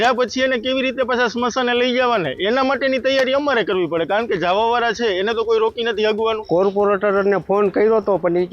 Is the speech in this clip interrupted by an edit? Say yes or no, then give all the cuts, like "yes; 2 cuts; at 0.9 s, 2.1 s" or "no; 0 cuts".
yes; 1 cut; at 6.4 s